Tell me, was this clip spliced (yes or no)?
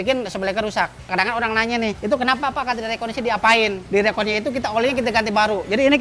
yes